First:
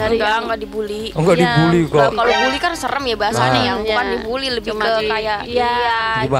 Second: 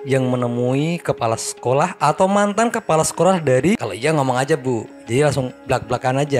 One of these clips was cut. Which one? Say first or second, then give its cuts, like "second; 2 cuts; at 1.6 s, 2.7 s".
second; 1 cut; at 3.8 s